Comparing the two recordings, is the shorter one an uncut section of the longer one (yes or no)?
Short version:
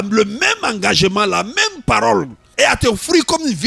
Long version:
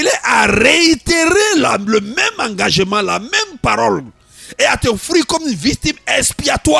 no